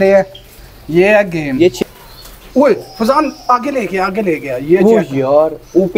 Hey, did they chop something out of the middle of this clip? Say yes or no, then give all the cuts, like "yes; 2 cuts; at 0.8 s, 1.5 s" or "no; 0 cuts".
yes; 1 cut; at 1.8 s